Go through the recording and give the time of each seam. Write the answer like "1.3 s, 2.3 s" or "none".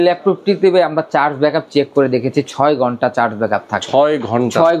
none